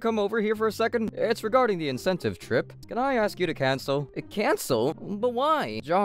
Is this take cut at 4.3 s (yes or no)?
no